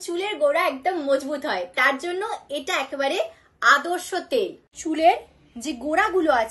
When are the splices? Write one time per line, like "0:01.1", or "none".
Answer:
0:04.6